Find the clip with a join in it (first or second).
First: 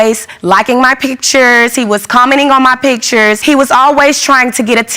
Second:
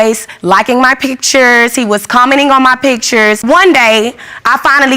second